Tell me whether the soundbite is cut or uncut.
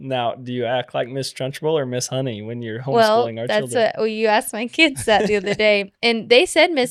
uncut